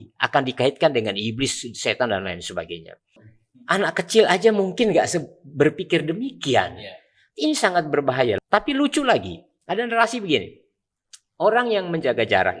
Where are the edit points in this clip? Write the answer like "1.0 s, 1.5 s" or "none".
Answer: 3.3 s, 8.4 s